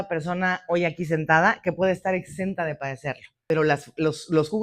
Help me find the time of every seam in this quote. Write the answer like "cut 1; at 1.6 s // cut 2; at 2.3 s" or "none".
cut 1; at 3.3 s